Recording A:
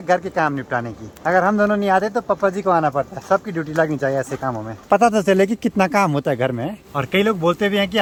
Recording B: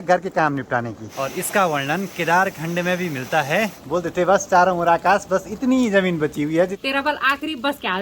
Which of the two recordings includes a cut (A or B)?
B